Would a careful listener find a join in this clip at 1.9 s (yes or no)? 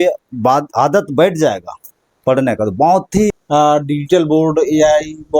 no